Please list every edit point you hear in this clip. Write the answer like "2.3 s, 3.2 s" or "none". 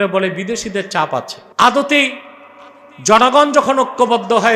1.4 s